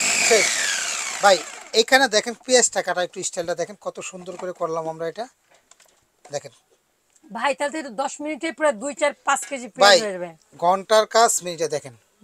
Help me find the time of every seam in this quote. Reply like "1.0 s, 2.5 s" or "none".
none